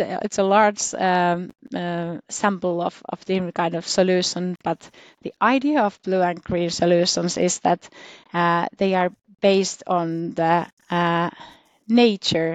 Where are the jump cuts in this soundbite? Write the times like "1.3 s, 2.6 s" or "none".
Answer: none